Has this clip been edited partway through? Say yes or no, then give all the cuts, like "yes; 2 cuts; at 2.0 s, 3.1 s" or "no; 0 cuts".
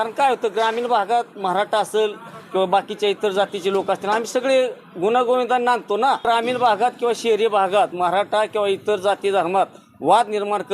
yes; 1 cut; at 6.2 s